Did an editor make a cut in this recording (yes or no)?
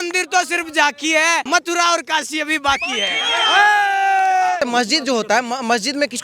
yes